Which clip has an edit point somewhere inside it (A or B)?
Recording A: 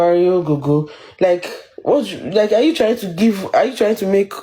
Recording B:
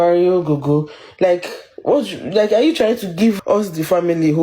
B